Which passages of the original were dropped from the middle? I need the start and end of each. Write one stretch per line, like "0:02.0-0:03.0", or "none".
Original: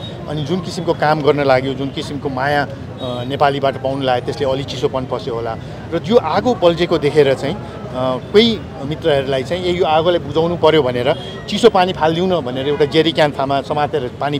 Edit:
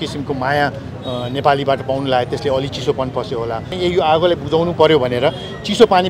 0:05.7-0:09.5